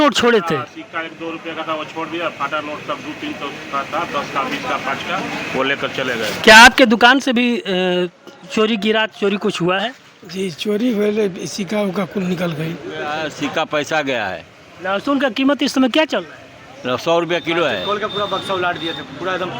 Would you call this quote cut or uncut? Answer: cut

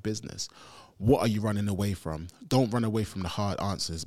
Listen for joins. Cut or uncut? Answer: uncut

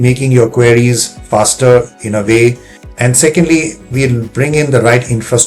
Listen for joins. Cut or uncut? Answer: cut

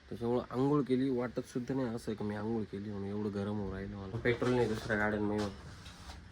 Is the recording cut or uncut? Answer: cut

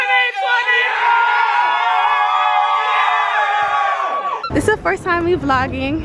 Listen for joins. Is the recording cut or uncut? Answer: cut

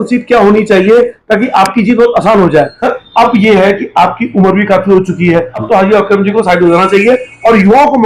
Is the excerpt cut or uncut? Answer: cut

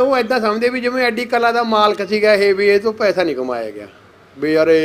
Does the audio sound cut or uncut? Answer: uncut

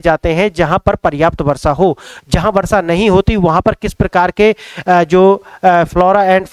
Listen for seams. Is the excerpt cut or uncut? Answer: uncut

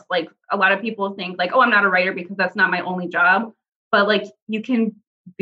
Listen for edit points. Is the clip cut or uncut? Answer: uncut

